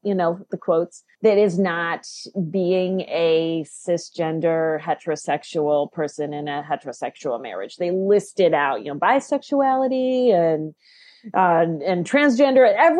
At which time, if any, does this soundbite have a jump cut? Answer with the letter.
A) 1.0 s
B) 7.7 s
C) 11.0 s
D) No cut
A